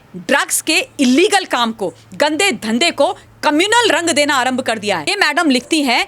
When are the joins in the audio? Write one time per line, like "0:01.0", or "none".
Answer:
0:05.1